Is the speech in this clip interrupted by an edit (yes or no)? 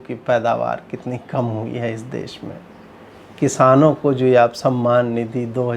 no